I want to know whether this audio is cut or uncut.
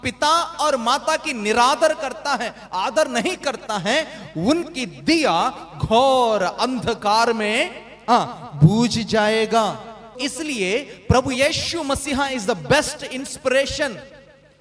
cut